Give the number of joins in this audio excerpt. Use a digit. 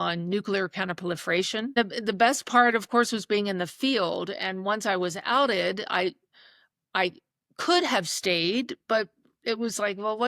1